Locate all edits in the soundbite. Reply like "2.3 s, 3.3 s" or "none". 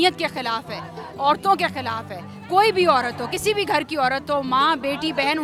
none